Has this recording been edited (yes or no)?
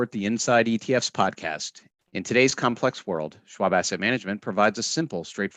no